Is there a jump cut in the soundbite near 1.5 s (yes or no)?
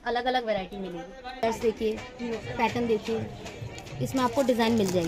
yes